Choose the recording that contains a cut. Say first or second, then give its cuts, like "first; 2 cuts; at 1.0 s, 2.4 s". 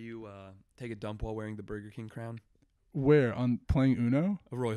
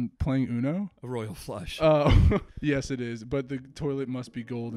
second; 1 cut; at 2.5 s